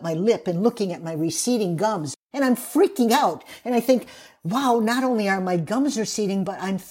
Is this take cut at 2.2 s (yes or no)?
yes